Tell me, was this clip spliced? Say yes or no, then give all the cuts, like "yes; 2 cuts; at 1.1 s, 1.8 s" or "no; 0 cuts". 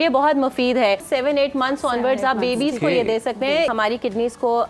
yes; 2 cuts; at 1.0 s, 3.7 s